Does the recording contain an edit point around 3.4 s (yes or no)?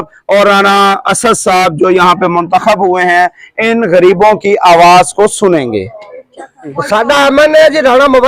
no